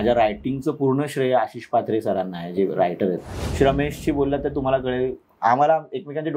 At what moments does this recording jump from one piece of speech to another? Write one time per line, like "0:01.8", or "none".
0:03.4